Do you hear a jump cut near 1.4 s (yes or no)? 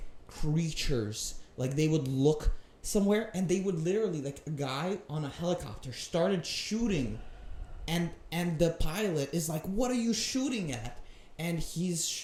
no